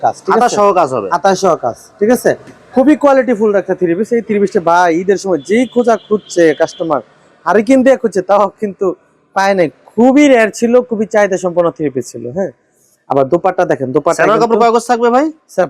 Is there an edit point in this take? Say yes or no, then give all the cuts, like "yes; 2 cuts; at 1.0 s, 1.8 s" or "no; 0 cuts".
no; 0 cuts